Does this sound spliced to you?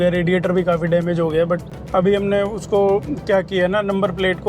yes; 1 cut; at 1.7 s

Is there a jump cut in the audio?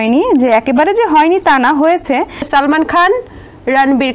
yes; 1 cut; at 2.4 s

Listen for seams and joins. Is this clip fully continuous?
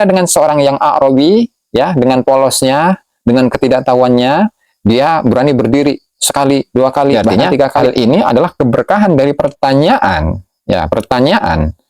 no; 1 cut; at 7.8 s

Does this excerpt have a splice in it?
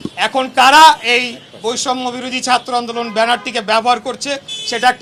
no; 0 cuts

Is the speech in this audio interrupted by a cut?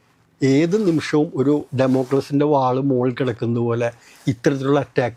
no; 0 cuts

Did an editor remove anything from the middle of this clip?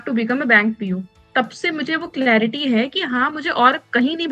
no; 0 cuts

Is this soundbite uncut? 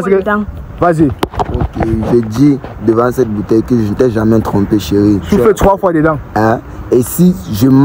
yes; 0 cuts

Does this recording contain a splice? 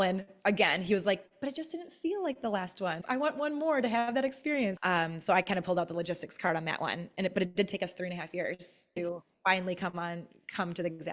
yes; 3 cuts; at 3.0 s, 4.8 s, 9.0 s

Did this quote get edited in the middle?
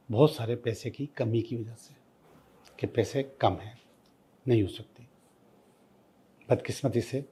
no; 0 cuts

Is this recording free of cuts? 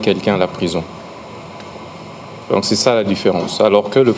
yes; 0 cuts

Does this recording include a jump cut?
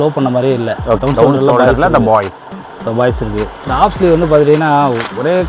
yes; 2 cuts; at 1.0 s, 3.6 s

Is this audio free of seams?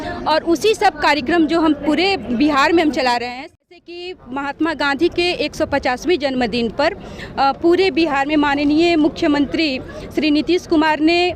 no; 1 cut; at 3.3 s

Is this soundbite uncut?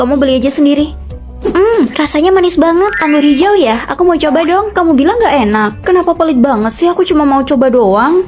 yes; 0 cuts

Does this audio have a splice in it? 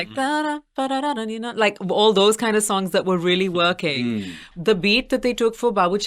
yes; 1 cut; at 4.5 s

